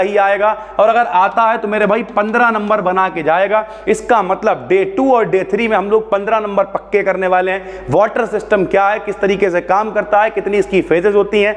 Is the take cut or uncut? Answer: uncut